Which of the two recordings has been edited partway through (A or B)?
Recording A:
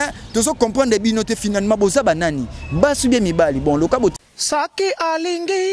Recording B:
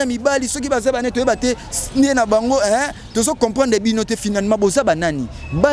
A